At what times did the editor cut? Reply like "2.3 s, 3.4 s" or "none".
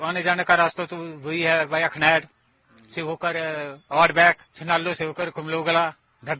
4.5 s